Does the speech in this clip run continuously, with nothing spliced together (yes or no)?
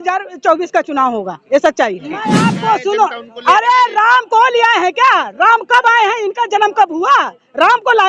no